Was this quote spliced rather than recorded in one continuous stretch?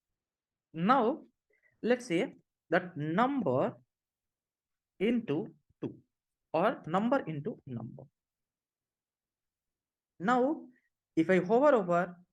no; 0 cuts

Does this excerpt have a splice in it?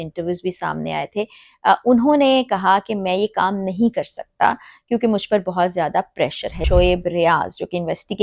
yes; 1 cut; at 6.5 s

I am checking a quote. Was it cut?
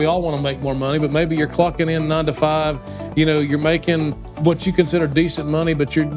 no; 0 cuts

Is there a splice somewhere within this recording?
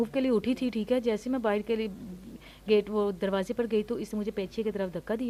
no; 0 cuts

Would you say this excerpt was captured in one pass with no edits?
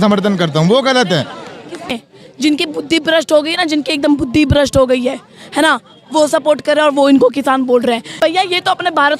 no; 2 cuts; at 1.9 s, 8.2 s

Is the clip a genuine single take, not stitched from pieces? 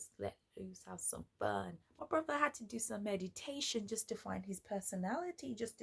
yes; 0 cuts

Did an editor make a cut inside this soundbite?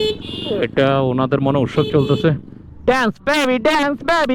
no; 0 cuts

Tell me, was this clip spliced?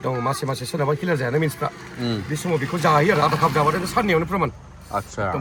no; 0 cuts

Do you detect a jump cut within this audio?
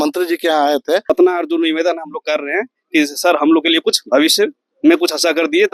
yes; 1 cut; at 1.1 s

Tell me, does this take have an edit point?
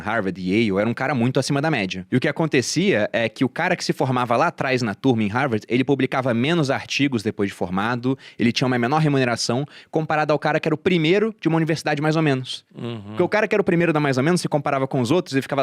yes; 1 cut; at 2.0 s

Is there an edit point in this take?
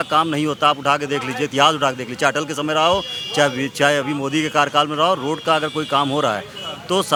no; 0 cuts

